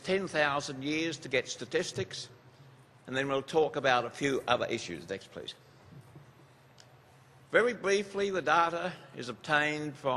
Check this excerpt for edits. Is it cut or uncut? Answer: uncut